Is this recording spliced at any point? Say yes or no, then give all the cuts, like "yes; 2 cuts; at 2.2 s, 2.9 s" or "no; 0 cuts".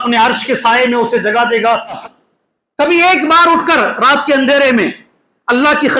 yes; 1 cut; at 2.0 s